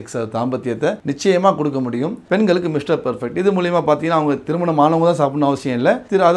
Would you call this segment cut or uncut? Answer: cut